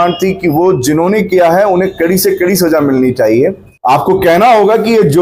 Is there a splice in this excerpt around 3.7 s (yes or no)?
yes